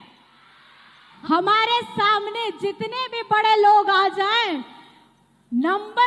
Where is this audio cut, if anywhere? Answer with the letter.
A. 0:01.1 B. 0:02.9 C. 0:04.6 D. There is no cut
A